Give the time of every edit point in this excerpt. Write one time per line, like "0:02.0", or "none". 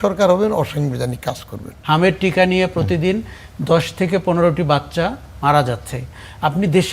0:01.7